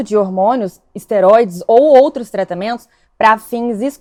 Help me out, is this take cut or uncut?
uncut